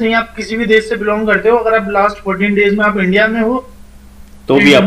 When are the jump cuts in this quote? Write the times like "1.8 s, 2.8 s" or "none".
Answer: none